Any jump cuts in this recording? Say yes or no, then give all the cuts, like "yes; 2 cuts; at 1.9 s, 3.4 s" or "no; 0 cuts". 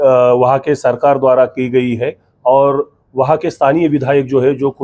no; 0 cuts